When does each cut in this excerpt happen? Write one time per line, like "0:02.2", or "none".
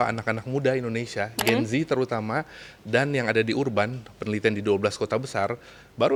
none